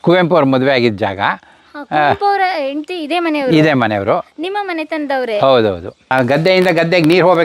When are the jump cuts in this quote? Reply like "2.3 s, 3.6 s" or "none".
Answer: 5.9 s